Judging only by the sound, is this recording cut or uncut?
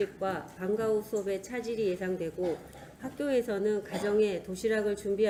uncut